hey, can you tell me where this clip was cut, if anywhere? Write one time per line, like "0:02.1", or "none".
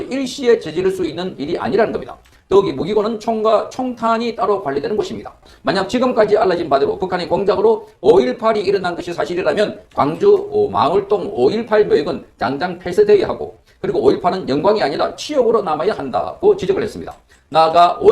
0:05.3